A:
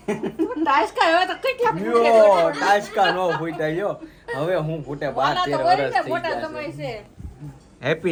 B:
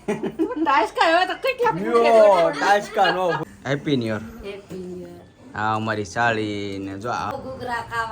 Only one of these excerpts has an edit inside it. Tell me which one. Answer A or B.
B